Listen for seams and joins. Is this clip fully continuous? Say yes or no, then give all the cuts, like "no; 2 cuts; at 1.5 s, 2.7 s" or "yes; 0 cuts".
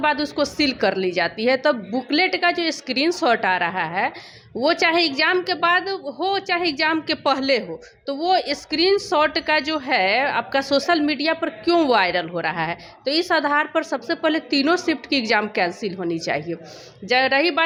yes; 0 cuts